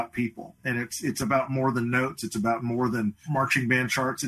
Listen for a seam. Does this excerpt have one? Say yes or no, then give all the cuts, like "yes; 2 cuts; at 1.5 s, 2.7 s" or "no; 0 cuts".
yes; 1 cut; at 3.2 s